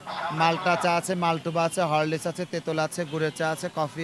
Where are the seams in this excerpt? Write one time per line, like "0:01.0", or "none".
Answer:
none